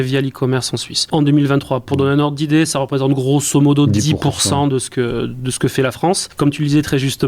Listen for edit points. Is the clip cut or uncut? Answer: cut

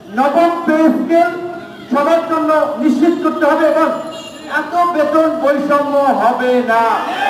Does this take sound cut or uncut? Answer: uncut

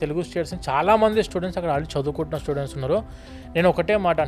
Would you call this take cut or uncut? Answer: uncut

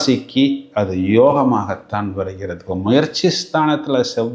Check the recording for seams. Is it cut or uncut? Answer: uncut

